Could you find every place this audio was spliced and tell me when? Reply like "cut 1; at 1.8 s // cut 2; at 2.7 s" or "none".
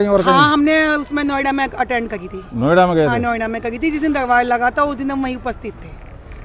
none